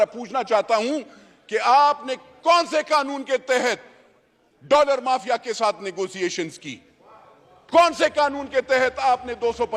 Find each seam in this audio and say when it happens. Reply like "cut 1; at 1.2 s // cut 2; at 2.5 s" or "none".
none